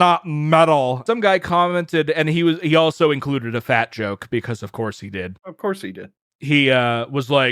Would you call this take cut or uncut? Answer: cut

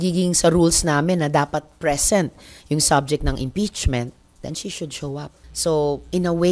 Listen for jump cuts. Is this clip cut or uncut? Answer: cut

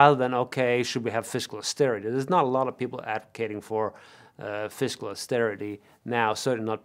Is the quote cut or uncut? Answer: uncut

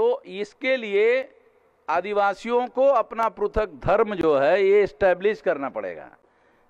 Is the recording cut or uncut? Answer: uncut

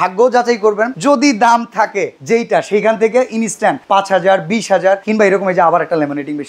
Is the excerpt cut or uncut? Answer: cut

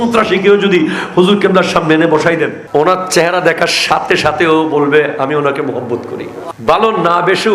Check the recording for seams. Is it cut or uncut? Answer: cut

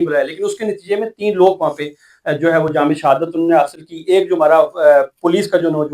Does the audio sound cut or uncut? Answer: uncut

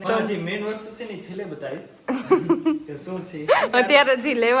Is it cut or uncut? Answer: uncut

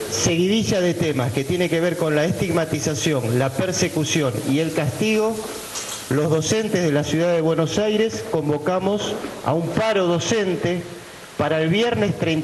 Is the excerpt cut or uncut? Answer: uncut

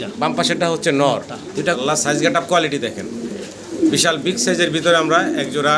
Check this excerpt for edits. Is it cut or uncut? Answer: cut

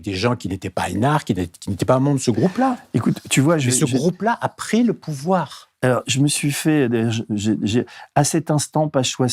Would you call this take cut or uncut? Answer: uncut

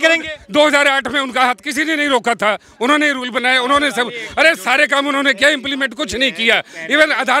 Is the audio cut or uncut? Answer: uncut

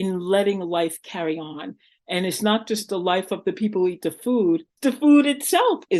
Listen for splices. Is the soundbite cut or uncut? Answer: cut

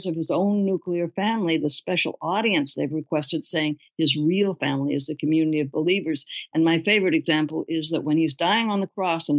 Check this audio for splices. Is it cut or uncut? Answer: uncut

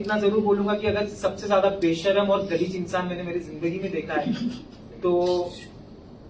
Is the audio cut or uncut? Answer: uncut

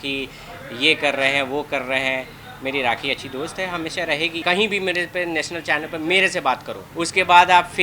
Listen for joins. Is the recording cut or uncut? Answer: cut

